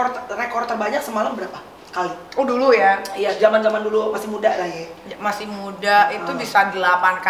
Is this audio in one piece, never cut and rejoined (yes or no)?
yes